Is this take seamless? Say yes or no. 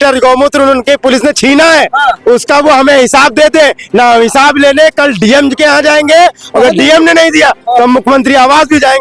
yes